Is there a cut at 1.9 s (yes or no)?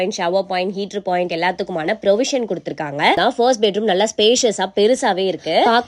no